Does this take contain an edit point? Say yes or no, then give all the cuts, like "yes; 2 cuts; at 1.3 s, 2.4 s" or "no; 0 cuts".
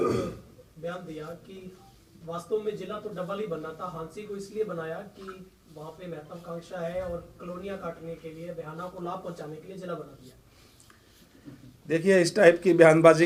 no; 0 cuts